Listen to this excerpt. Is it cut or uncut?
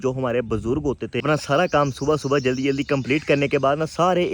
cut